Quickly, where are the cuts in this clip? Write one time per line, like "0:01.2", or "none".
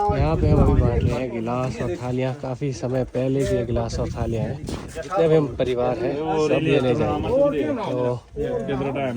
none